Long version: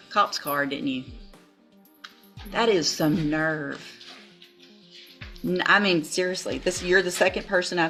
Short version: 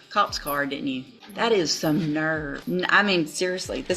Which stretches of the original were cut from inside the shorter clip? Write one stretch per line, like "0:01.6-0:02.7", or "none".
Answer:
0:01.2-0:02.4
0:03.7-0:05.3